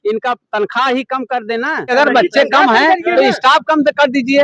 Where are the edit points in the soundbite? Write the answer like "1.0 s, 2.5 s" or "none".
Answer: 1.9 s